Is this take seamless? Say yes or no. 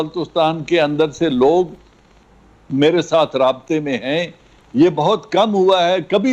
yes